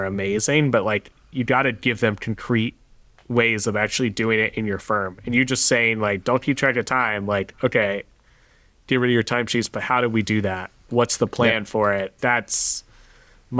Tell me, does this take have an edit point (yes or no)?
yes